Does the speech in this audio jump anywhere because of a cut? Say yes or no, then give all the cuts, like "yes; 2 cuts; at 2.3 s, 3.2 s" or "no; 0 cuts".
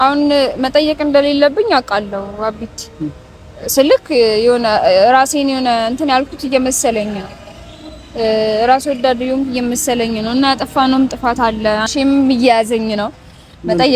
yes; 1 cut; at 11.9 s